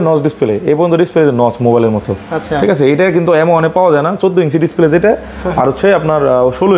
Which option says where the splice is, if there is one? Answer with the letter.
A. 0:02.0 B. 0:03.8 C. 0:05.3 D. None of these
D